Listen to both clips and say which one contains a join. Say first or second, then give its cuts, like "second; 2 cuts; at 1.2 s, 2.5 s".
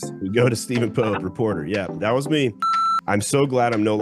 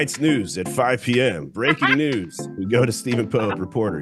first; 1 cut; at 2.6 s